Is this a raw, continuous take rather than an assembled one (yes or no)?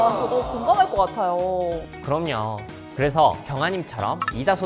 yes